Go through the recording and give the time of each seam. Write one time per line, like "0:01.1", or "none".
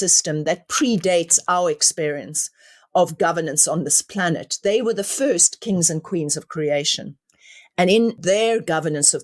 0:08.2